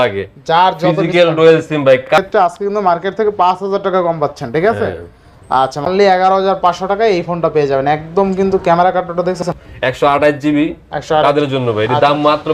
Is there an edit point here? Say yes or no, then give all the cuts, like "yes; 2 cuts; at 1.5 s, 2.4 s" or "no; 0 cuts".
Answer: yes; 3 cuts; at 2.0 s, 5.9 s, 9.5 s